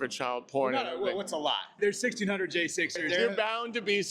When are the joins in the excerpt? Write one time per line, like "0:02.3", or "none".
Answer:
0:01.8
0:03.0